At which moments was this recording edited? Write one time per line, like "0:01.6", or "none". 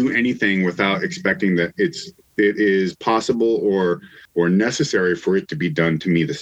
0:04.2